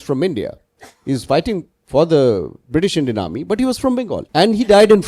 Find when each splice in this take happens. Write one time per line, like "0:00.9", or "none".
0:02.5
0:04.2